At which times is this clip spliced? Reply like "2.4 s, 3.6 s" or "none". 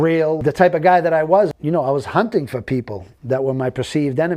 1.5 s